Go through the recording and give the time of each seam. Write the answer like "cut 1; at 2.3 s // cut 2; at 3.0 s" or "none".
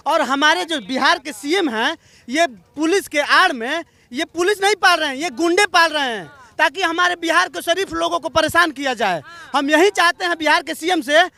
none

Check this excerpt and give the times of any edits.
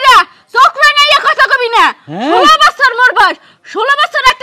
none

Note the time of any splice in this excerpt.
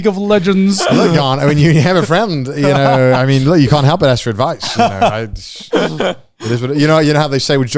none

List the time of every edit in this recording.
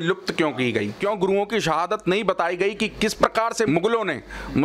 cut 1; at 1.0 s // cut 2; at 3.7 s

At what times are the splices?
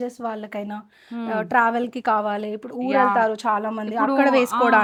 none

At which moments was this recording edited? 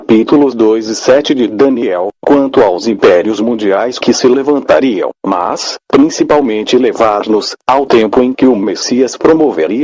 cut 1; at 0.9 s

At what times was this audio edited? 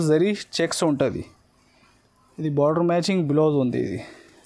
none

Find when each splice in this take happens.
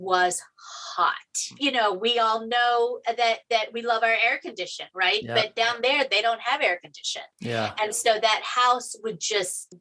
cut 1; at 1.5 s

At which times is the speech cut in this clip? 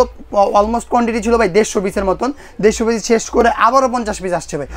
none

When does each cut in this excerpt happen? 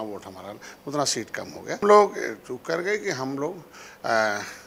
cut 1; at 1.8 s

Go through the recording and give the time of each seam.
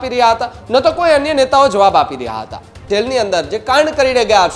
cut 1; at 2.8 s

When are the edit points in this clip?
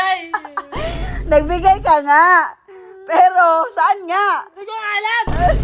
none

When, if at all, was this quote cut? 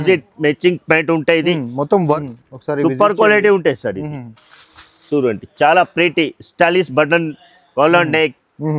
cut 1; at 2.2 s

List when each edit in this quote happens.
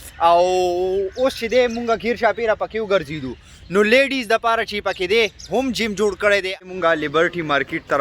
cut 1; at 6.5 s

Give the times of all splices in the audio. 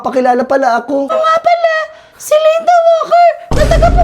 cut 1; at 1.1 s

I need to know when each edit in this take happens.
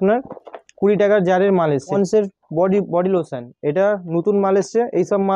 cut 1; at 1.9 s

